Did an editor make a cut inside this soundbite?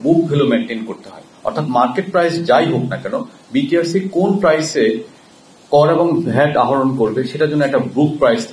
no; 0 cuts

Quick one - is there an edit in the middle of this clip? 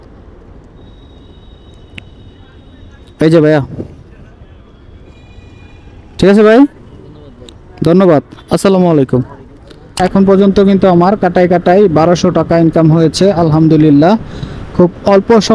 yes; 1 cut; at 9.7 s

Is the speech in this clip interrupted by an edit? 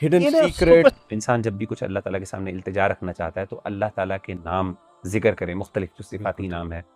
yes; 1 cut; at 1.0 s

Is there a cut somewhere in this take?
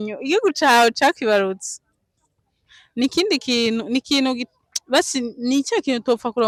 no; 0 cuts

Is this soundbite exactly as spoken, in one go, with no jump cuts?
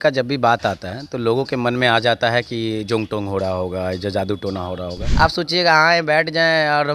no; 1 cut; at 5.0 s

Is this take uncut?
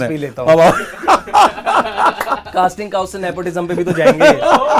yes; 0 cuts

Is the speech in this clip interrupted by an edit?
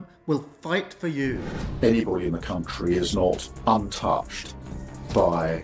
yes; 1 cut; at 1.4 s

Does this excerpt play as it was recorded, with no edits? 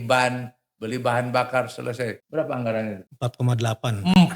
no; 2 cuts; at 2.2 s, 3.0 s

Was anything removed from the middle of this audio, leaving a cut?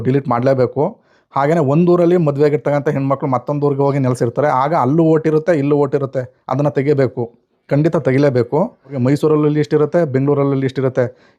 yes; 1 cut; at 8.9 s

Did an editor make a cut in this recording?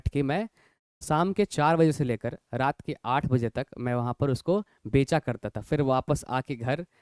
no; 0 cuts

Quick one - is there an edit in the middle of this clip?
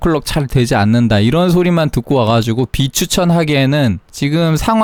no; 0 cuts

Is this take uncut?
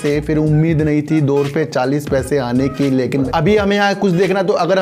no; 1 cut; at 3.1 s

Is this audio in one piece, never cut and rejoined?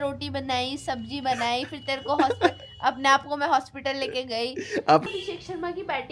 no; 1 cut; at 5.0 s

